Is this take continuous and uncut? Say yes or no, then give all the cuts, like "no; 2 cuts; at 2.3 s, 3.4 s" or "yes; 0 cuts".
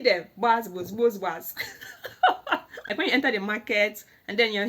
no; 1 cut; at 2.9 s